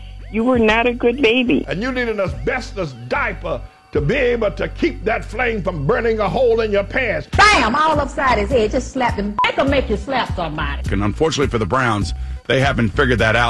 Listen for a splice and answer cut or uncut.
uncut